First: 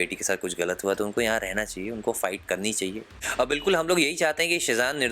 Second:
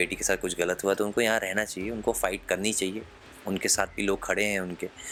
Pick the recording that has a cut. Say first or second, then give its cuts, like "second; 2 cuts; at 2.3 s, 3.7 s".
first; 1 cut; at 3.1 s